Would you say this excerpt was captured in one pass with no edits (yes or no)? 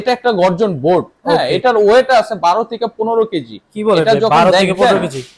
yes